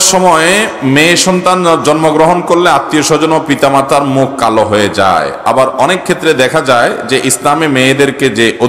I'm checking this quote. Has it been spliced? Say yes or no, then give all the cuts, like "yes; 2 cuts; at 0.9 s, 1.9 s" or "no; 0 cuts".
no; 0 cuts